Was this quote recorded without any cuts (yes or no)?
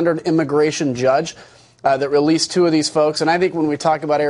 no